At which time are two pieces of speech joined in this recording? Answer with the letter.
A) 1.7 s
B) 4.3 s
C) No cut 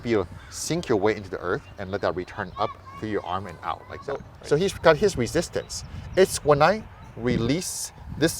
B